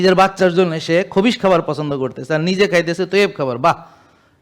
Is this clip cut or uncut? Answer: uncut